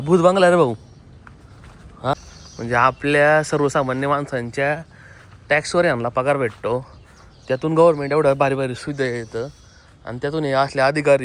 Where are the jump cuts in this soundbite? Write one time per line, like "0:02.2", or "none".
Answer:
0:02.1